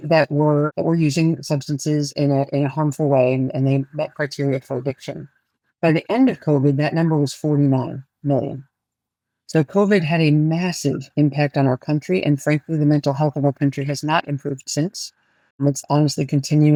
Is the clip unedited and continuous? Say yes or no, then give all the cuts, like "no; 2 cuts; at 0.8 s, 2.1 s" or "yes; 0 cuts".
yes; 0 cuts